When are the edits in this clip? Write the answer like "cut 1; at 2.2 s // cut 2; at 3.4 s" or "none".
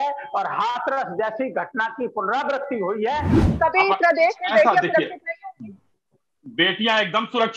cut 1; at 3.4 s